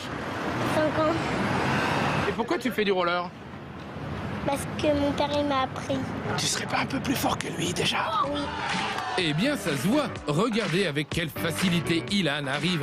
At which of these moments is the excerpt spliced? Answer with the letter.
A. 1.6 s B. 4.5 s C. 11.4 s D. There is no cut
D